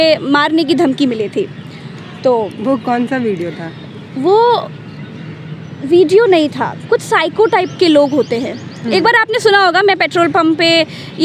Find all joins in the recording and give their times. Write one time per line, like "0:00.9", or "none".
none